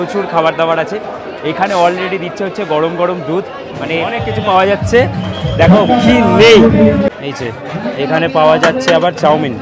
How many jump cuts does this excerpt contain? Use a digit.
1